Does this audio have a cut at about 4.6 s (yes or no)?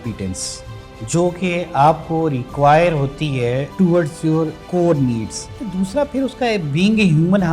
yes